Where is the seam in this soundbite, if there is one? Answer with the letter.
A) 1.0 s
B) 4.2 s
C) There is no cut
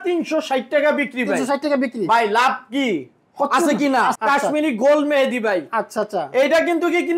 B